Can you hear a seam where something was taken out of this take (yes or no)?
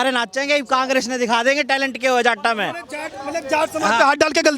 no